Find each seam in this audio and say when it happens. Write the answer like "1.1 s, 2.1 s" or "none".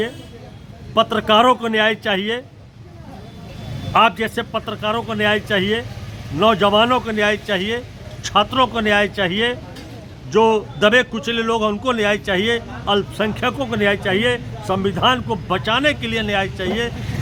none